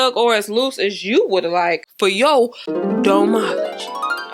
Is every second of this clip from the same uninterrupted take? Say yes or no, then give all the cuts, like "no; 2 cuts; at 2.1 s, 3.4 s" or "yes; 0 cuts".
no; 1 cut; at 1.9 s